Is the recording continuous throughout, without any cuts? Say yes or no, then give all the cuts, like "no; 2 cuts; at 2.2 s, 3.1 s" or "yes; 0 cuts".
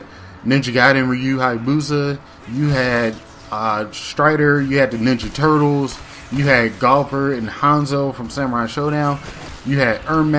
yes; 0 cuts